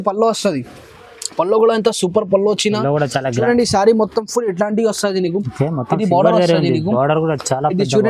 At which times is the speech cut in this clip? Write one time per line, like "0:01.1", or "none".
0:03.4